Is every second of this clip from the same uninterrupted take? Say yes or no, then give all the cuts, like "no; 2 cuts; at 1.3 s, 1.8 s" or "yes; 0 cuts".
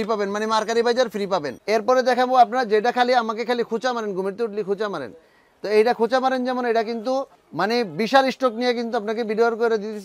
no; 2 cuts; at 1.5 s, 7.4 s